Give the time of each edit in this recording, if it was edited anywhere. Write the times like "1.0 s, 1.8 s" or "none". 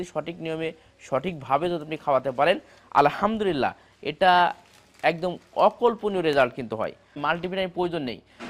7.2 s